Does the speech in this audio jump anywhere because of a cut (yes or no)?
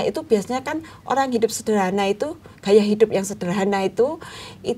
no